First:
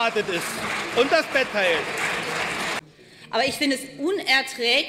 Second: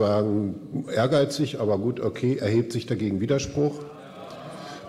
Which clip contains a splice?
first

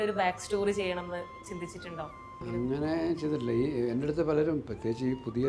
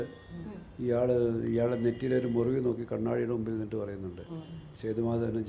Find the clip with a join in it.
first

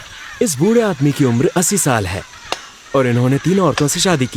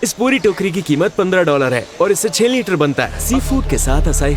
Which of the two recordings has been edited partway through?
second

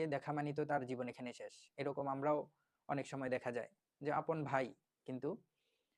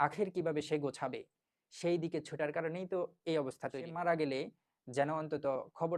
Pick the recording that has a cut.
second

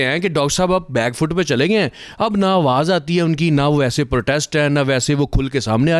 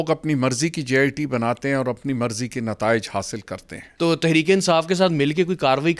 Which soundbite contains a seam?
second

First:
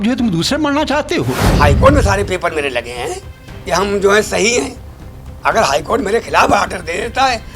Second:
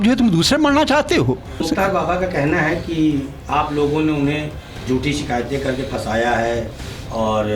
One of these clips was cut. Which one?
first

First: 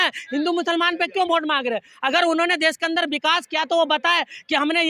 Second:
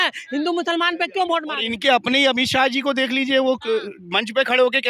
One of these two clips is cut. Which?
second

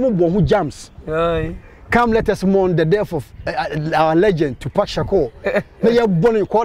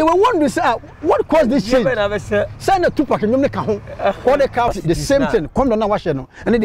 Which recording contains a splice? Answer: second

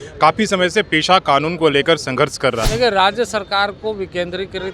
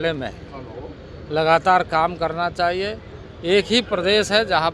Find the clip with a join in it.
first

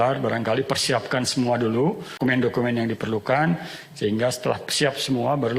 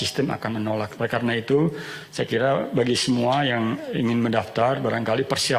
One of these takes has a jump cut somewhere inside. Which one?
first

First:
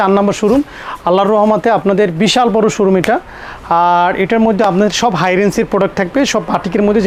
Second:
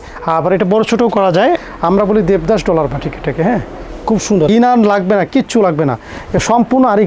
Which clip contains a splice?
second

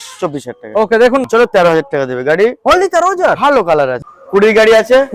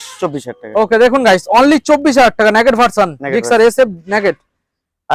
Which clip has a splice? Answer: first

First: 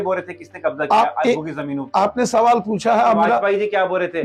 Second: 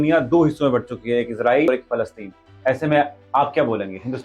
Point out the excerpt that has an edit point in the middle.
second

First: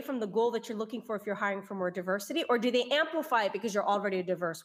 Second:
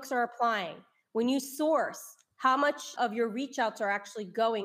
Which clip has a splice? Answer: second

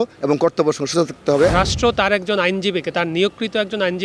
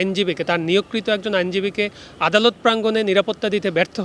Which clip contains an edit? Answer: first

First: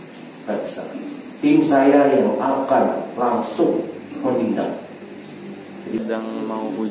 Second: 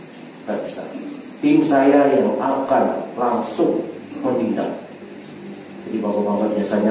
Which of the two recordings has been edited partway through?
first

